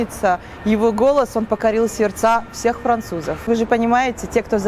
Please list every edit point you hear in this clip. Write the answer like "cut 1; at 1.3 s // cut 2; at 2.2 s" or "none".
cut 1; at 3.5 s